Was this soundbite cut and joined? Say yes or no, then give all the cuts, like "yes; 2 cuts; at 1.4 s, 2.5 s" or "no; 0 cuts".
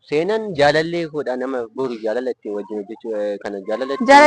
no; 0 cuts